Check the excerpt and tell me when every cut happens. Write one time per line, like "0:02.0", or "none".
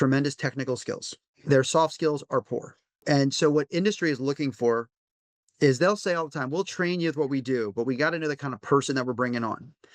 0:01.3
0:03.0